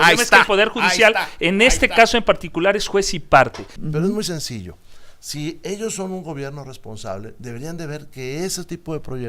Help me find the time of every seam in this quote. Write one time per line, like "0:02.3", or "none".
0:03.7

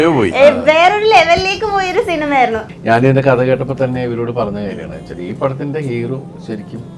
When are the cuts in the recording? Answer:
0:02.7

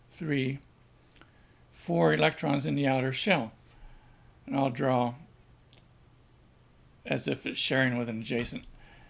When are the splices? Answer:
0:03.1

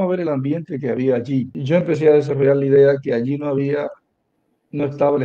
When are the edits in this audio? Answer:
0:01.6

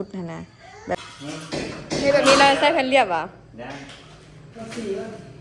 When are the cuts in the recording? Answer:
0:01.1

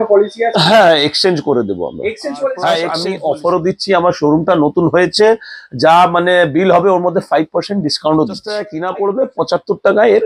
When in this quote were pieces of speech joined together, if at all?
0:03.0
0:08.7

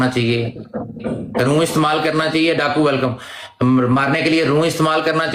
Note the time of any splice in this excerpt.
none

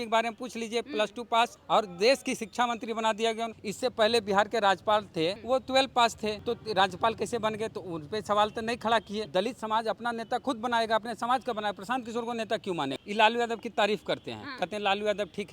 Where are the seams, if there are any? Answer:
0:01.6
0:03.6
0:05.4
0:06.4
0:09.3
0:13.0

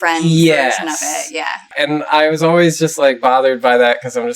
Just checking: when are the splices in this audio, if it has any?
0:01.7

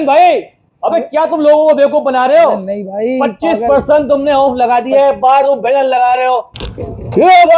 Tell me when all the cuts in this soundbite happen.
0:06.5

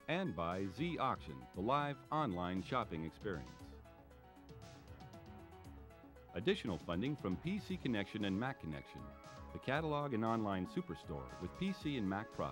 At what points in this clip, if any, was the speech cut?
0:03.4
0:06.1

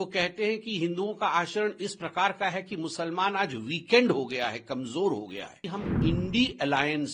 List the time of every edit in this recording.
0:05.6

